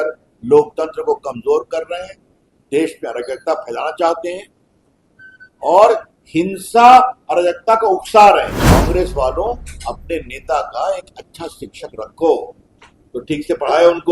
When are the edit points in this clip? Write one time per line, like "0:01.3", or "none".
0:08.6